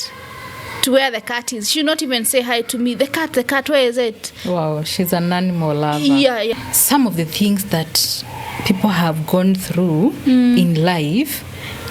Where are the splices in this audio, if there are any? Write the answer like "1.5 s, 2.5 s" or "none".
6.7 s